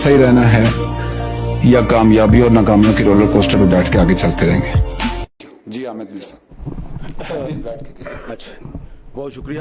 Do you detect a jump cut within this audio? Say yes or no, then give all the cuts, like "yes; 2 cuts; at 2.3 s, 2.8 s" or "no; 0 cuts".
yes; 1 cut; at 5.1 s